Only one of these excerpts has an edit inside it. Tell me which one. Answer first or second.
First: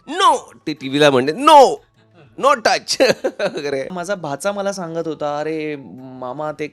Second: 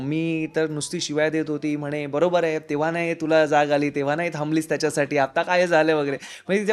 first